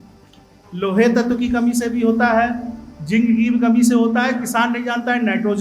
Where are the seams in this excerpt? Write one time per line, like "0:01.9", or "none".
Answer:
none

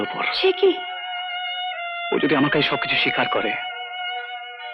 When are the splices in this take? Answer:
none

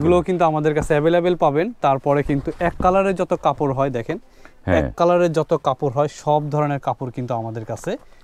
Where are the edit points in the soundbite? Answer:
none

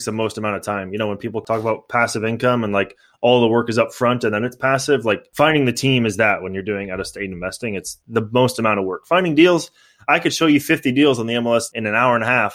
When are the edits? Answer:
0:01.4
0:05.3
0:11.7

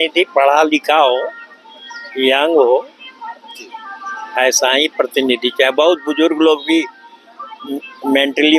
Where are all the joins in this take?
none

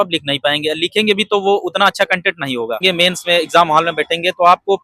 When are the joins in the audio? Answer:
0:02.8

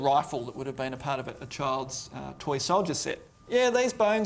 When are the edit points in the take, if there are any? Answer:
0:03.3

